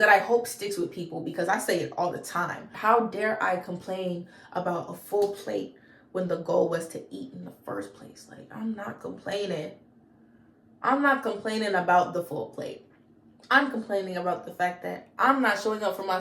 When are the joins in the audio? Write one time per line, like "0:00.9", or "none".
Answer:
0:02.7